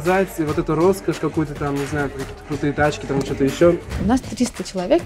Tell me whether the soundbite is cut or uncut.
cut